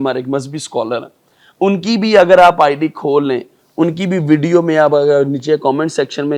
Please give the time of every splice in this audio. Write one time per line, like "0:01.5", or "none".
none